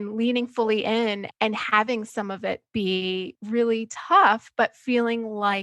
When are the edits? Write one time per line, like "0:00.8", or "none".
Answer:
0:01.2
0:03.4